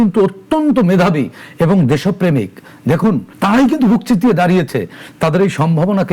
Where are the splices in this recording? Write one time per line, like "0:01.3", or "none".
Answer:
0:03.3